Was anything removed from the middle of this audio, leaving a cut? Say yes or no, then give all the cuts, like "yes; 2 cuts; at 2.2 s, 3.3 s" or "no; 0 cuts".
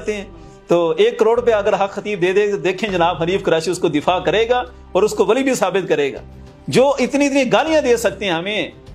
no; 0 cuts